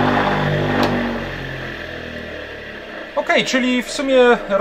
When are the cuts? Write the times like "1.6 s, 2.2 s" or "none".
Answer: 3.1 s